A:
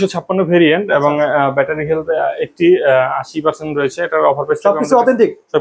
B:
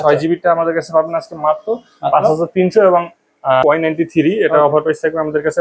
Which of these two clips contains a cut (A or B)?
B